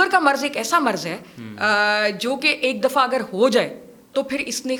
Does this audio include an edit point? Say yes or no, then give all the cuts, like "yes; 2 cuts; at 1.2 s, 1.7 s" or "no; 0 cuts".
no; 0 cuts